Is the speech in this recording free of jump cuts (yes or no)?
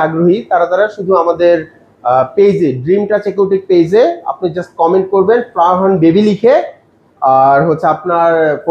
yes